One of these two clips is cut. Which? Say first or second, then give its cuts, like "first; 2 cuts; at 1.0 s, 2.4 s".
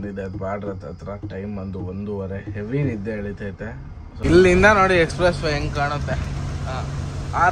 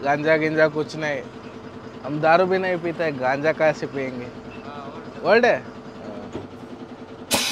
first; 1 cut; at 4.1 s